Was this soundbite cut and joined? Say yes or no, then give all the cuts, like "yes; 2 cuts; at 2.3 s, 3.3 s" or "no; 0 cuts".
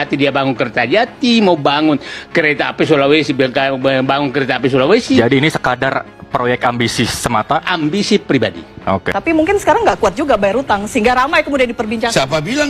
yes; 1 cut; at 9.1 s